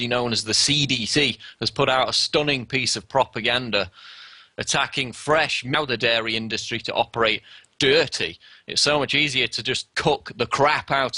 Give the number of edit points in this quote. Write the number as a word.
zero